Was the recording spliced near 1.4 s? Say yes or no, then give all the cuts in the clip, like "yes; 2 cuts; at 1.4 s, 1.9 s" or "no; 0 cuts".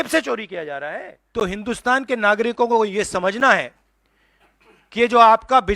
yes; 1 cut; at 1.4 s